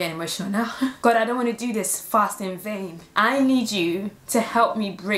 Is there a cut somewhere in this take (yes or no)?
yes